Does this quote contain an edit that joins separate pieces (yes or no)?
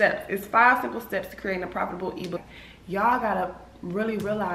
yes